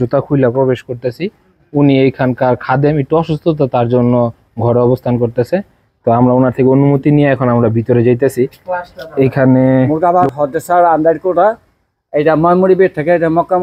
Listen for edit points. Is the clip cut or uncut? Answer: cut